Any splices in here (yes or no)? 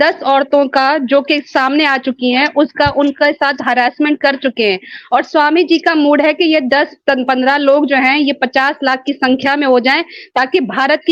no